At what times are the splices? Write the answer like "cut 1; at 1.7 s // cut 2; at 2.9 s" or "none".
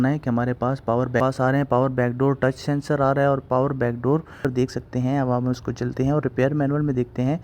cut 1; at 1.2 s // cut 2; at 4.4 s